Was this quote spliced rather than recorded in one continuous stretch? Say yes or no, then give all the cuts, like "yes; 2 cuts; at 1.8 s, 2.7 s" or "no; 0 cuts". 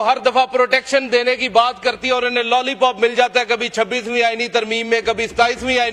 no; 0 cuts